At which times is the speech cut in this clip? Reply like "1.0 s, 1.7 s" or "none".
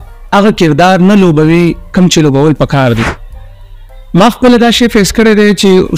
3.4 s